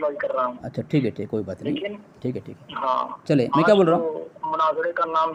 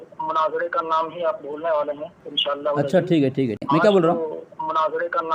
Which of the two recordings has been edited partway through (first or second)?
second